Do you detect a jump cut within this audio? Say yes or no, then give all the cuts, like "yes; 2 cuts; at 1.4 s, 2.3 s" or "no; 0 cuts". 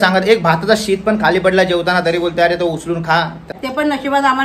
yes; 1 cut; at 3.5 s